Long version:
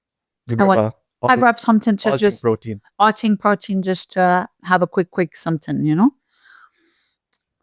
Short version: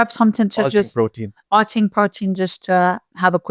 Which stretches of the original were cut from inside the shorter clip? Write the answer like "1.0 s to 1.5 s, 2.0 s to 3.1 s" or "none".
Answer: none